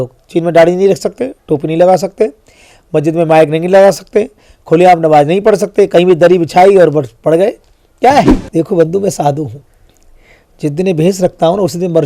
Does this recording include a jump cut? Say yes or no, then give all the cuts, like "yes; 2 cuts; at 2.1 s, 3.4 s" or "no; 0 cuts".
yes; 1 cut; at 8.4 s